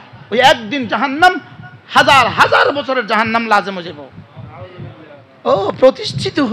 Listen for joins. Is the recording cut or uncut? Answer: cut